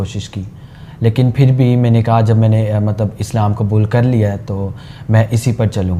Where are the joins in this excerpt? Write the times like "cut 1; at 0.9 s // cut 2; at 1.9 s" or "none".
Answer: none